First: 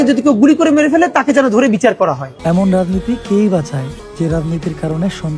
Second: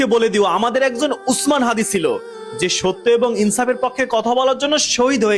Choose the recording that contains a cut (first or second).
first